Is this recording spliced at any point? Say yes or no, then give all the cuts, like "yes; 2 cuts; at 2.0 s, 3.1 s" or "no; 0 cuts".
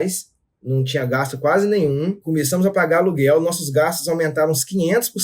yes; 1 cut; at 2.2 s